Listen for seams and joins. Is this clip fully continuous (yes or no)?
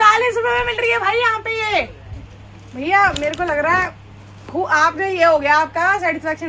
yes